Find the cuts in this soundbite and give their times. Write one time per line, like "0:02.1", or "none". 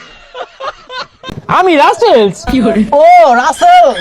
0:00.9